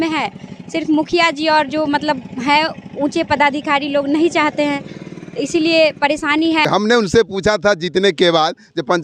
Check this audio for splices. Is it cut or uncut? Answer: cut